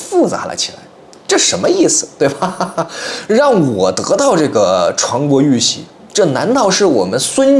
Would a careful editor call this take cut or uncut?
uncut